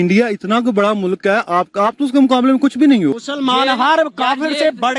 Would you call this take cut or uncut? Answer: uncut